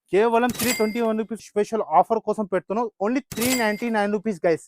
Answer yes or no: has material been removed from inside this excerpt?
yes